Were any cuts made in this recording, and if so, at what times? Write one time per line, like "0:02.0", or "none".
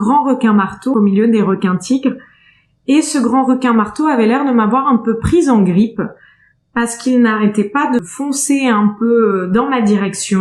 0:00.9
0:08.0